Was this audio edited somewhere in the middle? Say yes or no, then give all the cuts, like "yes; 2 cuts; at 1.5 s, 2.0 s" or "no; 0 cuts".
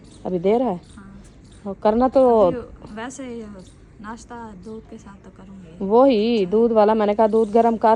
no; 0 cuts